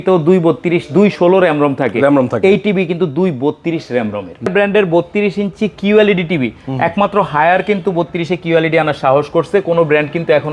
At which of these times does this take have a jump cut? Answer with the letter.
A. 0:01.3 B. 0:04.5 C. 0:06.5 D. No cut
B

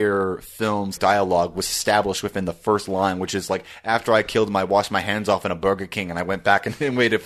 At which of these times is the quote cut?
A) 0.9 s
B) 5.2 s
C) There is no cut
A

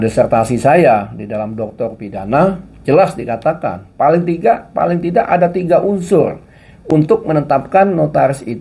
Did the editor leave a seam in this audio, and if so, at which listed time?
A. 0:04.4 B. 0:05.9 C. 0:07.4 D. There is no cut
D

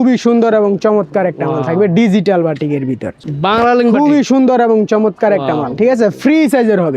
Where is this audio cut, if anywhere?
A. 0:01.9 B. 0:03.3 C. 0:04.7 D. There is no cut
B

